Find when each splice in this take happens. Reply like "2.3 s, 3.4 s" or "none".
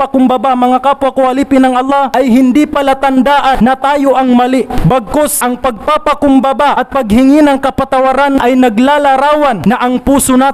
2.1 s, 3.6 s, 5.1 s, 6.8 s, 8.4 s, 9.6 s